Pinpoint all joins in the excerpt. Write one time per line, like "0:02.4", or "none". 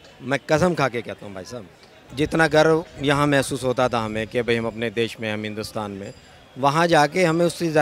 0:02.1